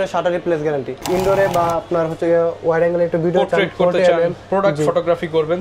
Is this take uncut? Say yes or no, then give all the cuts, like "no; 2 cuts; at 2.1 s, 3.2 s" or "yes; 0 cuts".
no; 1 cut; at 1.0 s